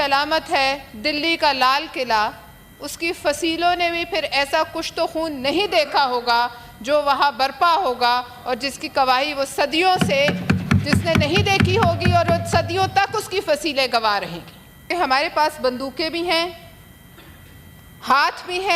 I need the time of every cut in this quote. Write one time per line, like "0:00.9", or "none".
0:14.9